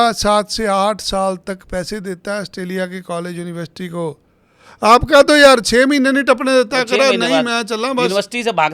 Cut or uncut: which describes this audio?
uncut